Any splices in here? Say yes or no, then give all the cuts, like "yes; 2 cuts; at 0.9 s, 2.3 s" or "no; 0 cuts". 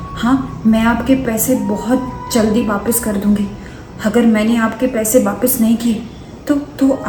no; 0 cuts